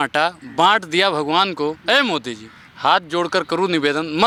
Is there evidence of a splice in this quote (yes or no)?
no